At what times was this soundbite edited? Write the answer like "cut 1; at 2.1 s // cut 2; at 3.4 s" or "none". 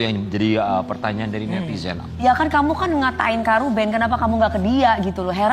none